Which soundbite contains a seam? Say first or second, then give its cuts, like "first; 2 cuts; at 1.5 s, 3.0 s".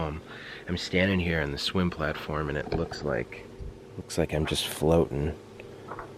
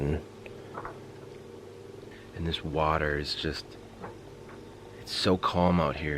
second; 1 cut; at 4.9 s